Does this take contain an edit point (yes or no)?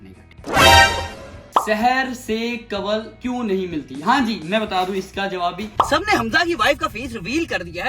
yes